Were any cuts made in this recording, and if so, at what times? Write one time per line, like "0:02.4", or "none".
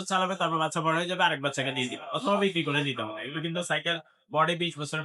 none